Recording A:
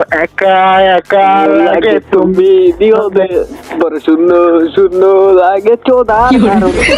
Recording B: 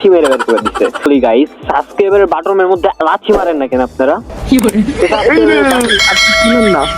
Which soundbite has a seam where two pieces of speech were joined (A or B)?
B